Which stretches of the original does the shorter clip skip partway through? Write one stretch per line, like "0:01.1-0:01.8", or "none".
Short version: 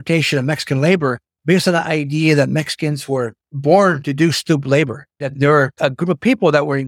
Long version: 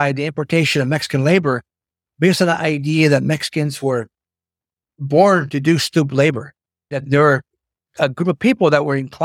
0:01.7-0:02.0
0:04.2-0:04.9
0:06.8-0:07.5